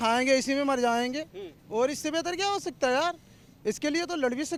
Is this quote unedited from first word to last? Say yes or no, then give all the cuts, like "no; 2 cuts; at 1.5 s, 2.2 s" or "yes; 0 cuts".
yes; 0 cuts